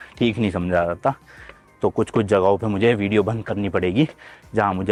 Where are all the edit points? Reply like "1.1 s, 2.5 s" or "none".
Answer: none